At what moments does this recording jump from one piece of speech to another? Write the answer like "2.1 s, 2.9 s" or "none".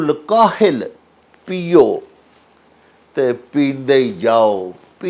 none